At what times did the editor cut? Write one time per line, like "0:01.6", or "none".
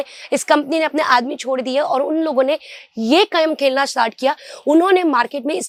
none